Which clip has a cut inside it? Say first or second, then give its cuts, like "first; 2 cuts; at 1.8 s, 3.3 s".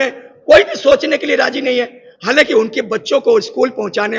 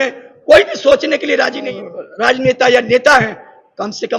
second; 1 cut; at 1.7 s